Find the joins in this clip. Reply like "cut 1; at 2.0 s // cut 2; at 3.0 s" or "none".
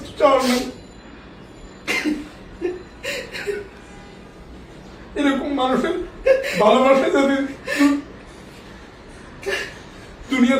none

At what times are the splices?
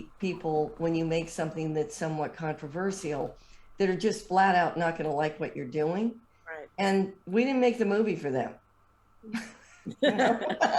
none

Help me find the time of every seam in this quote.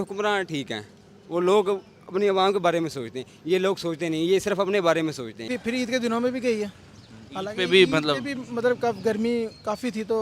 cut 1; at 5.5 s

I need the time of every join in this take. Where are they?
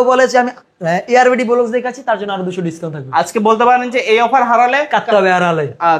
none

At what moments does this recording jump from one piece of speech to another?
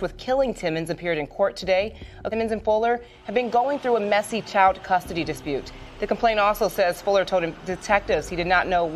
cut 1; at 2.2 s

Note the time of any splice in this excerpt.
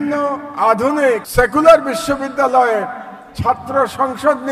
cut 1; at 1.3 s

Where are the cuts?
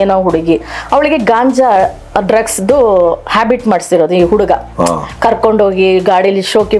none

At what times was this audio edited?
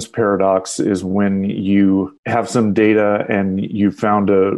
cut 1; at 2.2 s

